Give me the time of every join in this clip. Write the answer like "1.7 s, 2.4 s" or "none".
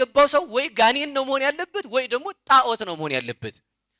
none